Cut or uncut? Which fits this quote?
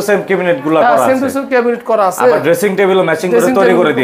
uncut